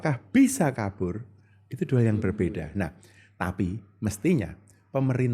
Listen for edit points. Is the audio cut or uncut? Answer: uncut